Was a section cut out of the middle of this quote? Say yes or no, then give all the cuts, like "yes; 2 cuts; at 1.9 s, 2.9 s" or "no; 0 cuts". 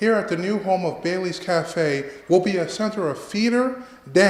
no; 0 cuts